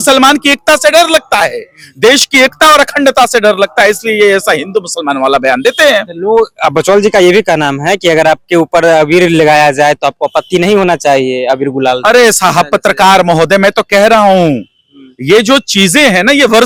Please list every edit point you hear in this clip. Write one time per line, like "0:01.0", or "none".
none